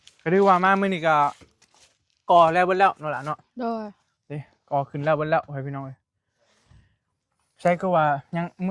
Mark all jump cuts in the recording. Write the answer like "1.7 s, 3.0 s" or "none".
none

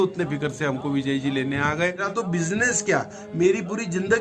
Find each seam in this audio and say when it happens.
2.1 s

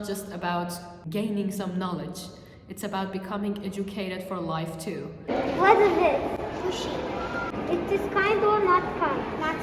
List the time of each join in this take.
1.0 s, 5.3 s, 7.5 s

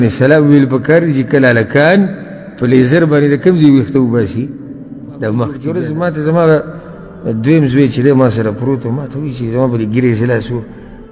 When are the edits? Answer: 5.7 s

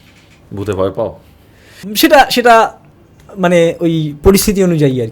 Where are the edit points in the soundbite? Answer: 1.9 s

